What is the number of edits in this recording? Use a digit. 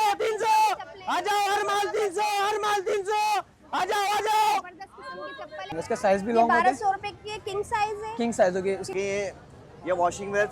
2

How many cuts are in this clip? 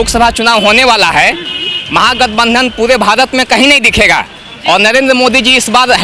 0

